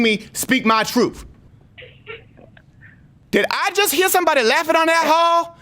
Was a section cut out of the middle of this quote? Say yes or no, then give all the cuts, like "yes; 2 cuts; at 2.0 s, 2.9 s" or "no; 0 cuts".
yes; 2 cuts; at 1.5 s, 3.1 s